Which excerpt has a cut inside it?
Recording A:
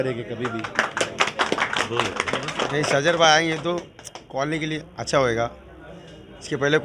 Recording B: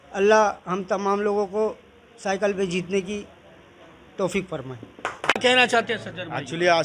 B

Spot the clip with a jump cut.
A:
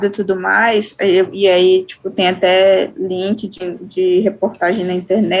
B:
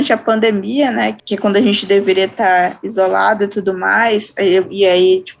B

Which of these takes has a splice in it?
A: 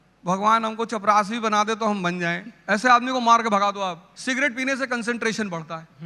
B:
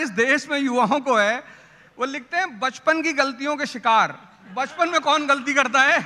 A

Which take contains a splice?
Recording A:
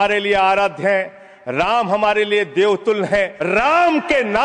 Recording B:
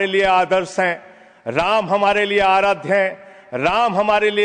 A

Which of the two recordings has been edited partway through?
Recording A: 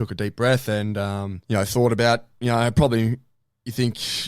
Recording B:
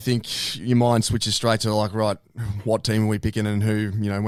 A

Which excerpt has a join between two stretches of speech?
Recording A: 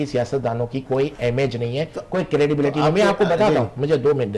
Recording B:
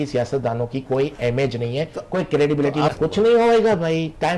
B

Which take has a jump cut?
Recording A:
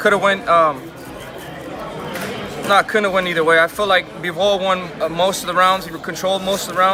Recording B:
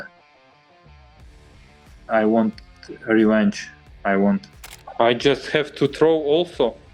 B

